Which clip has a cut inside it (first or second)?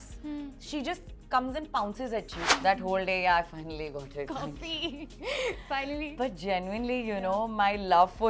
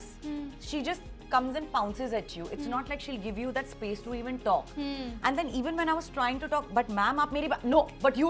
first